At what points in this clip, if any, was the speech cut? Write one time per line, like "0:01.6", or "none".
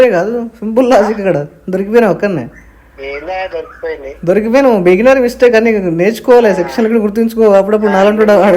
none